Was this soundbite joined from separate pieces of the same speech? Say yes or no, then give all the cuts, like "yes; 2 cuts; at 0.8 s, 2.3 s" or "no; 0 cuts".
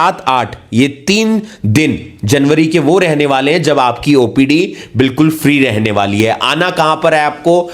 no; 0 cuts